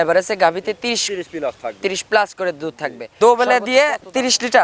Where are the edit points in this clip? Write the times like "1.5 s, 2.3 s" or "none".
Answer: 3.2 s